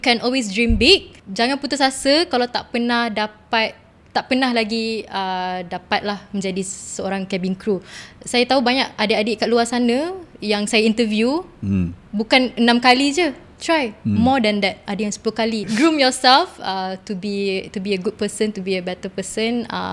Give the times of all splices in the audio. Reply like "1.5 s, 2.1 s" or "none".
1.2 s, 15.7 s

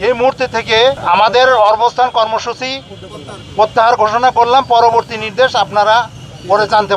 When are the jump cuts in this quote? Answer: 1.0 s

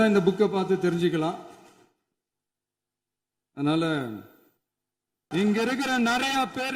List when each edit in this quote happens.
5.2 s

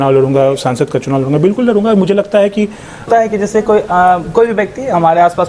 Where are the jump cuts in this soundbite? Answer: 3.1 s

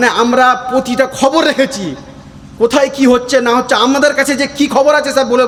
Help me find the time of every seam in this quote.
none

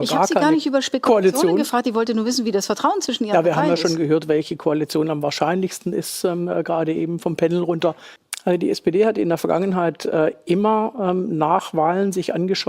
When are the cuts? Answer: 8.1 s

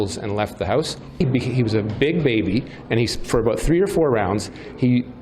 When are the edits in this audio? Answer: 1.2 s

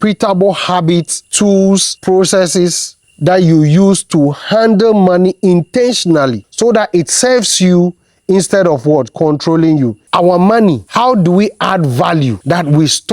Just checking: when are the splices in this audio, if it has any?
1.6 s, 6.4 s, 10.0 s

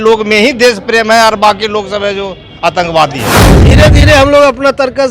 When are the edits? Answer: 3.7 s

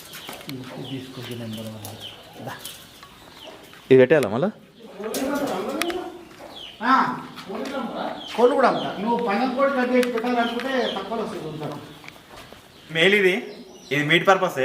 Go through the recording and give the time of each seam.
13.0 s

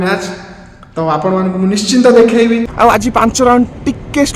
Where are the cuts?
2.7 s

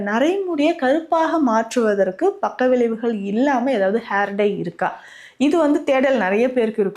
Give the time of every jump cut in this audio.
none

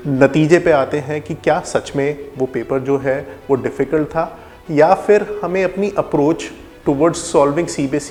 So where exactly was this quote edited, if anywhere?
none

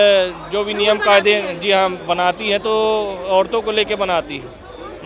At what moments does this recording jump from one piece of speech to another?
none

